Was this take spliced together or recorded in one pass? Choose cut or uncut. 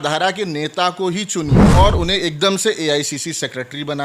cut